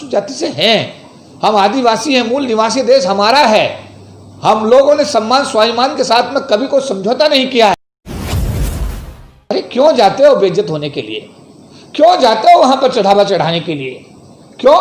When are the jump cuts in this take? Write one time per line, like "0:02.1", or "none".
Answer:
0:07.7
0:09.4